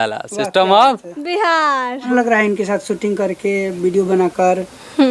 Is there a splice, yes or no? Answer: yes